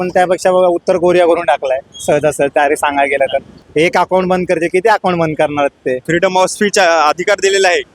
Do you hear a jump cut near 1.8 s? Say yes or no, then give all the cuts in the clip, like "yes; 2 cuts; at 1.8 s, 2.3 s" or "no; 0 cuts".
no; 2 cuts; at 3.6 s, 6.0 s